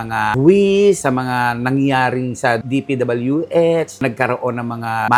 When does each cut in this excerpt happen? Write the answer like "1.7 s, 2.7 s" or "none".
none